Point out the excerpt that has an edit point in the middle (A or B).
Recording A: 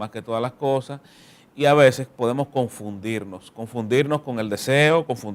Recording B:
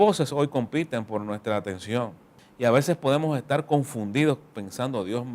B